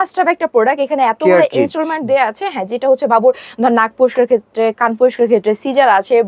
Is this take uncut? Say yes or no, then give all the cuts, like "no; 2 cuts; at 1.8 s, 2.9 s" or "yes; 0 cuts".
yes; 0 cuts